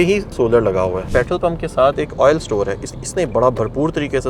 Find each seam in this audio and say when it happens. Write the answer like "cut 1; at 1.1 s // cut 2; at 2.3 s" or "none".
cut 1; at 1.0 s